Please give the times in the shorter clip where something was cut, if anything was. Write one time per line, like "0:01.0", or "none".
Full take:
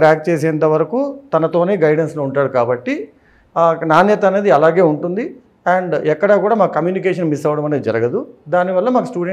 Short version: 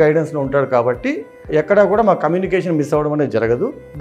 0:01.5